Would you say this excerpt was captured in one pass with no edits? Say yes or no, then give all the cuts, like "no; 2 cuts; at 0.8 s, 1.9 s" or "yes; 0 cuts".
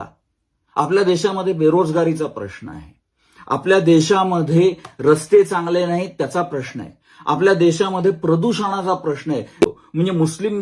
no; 1 cut; at 9.7 s